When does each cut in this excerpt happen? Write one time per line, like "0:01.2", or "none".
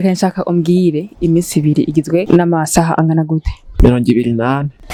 none